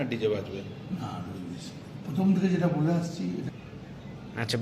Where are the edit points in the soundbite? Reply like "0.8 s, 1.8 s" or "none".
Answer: 3.5 s